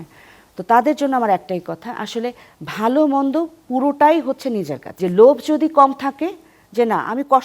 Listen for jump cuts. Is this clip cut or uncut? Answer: cut